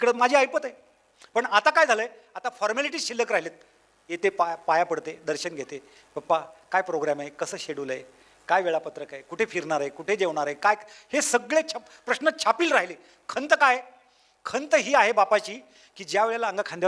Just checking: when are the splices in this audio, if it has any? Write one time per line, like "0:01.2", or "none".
none